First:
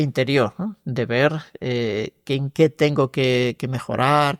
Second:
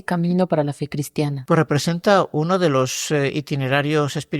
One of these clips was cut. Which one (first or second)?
second